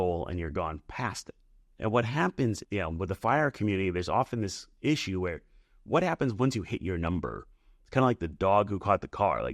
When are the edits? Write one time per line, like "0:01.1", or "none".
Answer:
0:02.6